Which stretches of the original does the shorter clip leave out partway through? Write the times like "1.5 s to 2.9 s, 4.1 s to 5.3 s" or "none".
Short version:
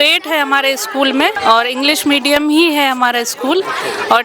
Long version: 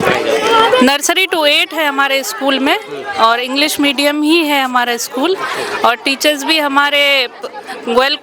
2.8 s to 3.1 s